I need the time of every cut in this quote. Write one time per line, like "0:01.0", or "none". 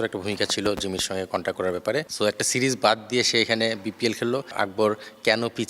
0:02.1
0:04.5